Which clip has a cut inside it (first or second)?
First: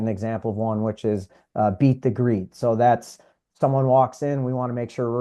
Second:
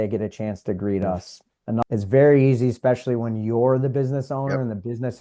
second